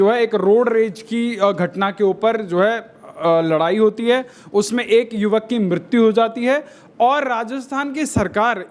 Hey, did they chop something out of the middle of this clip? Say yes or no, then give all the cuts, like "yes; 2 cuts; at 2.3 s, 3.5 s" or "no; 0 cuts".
no; 0 cuts